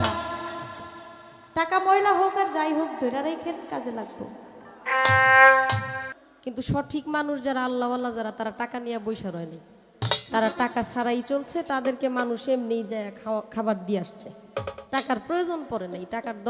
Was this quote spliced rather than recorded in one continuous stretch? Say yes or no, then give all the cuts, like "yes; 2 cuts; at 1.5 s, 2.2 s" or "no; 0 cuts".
yes; 1 cut; at 6.1 s